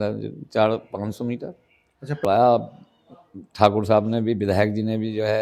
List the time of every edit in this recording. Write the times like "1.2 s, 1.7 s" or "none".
2.2 s